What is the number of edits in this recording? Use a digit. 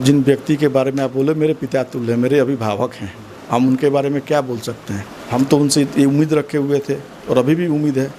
1